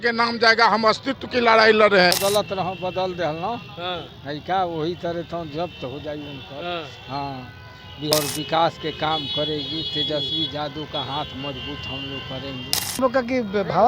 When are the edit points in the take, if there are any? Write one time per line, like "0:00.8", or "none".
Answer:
0:02.2
0:08.1
0:13.0